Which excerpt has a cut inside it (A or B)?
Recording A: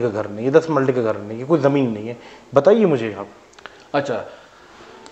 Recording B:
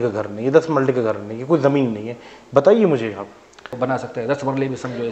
B